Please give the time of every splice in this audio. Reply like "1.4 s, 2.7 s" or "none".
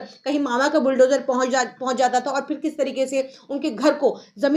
none